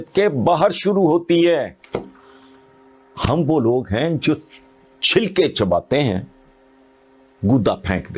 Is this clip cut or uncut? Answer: uncut